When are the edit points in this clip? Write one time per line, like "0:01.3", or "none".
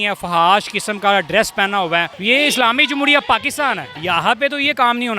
0:02.1
0:03.9